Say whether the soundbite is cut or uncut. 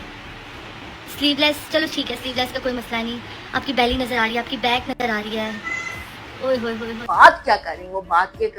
cut